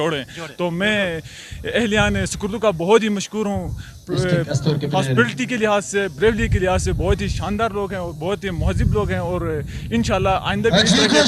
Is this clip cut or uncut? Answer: uncut